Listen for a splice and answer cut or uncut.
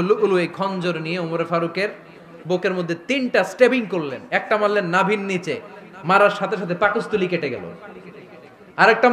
uncut